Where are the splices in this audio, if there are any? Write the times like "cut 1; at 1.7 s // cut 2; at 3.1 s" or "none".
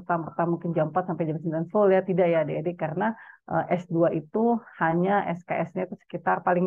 none